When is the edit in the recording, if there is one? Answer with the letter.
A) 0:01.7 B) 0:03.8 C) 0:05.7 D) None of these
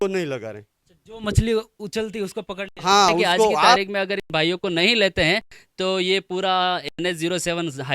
B